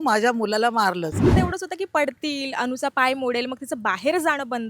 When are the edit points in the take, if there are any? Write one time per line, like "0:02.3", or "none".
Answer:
0:01.3